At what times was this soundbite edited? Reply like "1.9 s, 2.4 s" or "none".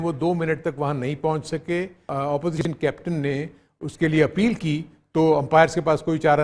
2.1 s